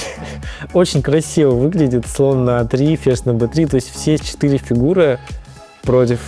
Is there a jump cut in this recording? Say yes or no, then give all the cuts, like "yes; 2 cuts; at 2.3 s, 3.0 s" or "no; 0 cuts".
no; 0 cuts